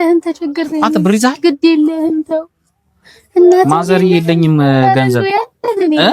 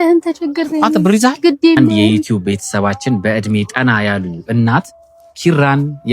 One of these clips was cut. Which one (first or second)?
second